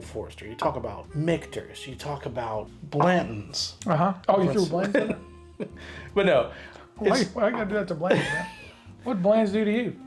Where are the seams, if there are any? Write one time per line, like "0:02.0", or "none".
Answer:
0:01.0
0:02.8
0:04.2